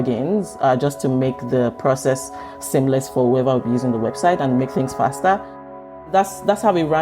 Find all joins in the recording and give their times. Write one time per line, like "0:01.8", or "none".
0:05.9